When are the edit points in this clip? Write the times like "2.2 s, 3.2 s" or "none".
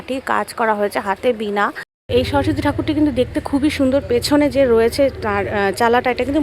1.9 s

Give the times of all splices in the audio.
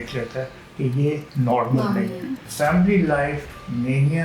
1.3 s, 2.4 s

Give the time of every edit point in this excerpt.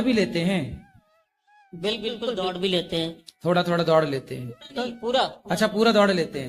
none

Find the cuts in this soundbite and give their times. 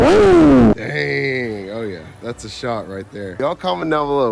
0.7 s, 3.4 s

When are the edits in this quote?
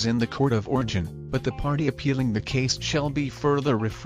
none

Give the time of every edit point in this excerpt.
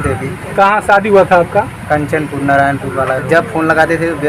3.2 s

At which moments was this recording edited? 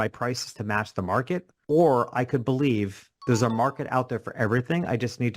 1.5 s, 3.1 s

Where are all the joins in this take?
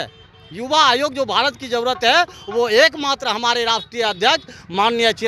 none

